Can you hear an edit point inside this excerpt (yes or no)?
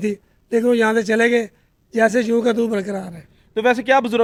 no